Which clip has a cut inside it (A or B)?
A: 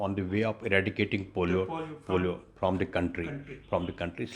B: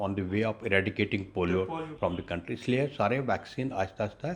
B